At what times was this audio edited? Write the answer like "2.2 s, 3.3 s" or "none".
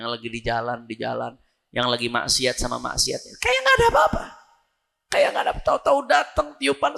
none